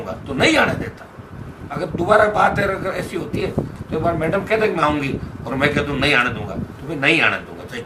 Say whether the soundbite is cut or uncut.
uncut